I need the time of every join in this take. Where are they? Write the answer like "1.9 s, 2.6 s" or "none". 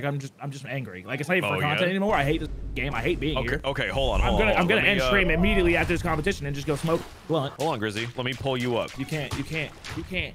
none